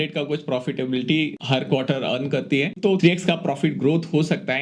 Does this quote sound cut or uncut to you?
cut